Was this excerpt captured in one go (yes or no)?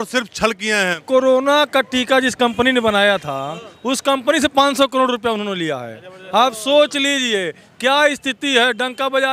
no